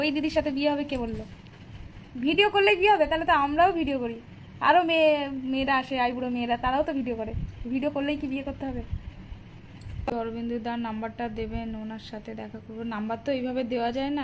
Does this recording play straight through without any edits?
no; 1 cut; at 10.1 s

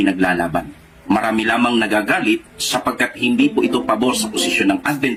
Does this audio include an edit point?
no; 0 cuts

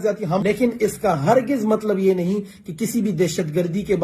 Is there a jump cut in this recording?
no; 0 cuts

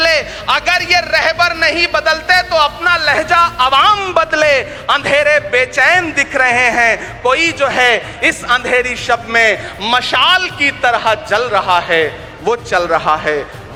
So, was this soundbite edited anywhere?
no; 0 cuts

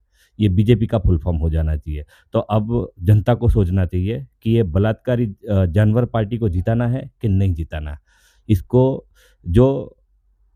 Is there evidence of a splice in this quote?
no; 0 cuts

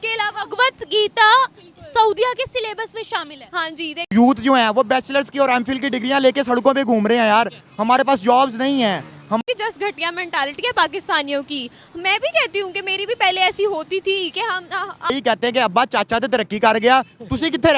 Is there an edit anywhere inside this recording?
yes; 3 cuts; at 4.0 s, 9.4 s, 15.1 s

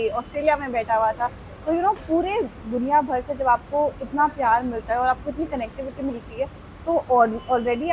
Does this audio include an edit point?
no; 0 cuts

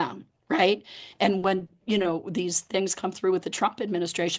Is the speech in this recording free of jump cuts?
yes; 0 cuts

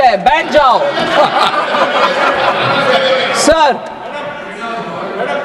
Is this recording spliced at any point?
no; 0 cuts

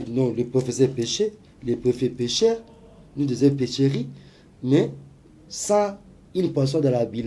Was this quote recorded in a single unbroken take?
yes; 0 cuts

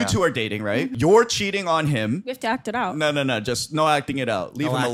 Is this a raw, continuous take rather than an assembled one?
no; 2 cuts; at 0.9 s, 2.3 s

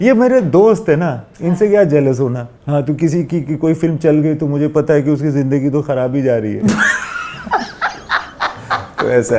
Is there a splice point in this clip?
no; 0 cuts

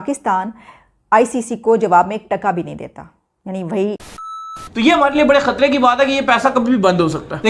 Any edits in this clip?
yes; 1 cut; at 4.5 s

